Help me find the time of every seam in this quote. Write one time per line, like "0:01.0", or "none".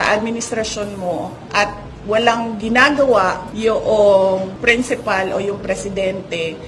none